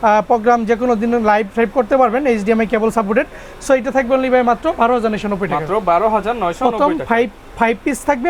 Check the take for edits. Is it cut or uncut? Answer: uncut